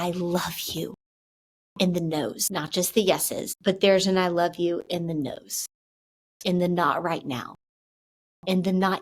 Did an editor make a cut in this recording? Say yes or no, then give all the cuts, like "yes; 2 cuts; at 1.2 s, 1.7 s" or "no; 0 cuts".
yes; 2 cuts; at 2.4 s, 3.5 s